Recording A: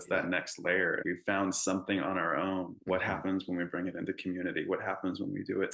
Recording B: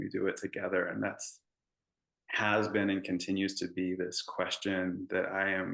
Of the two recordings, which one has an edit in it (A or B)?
A